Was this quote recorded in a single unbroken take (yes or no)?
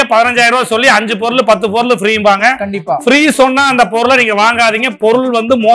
yes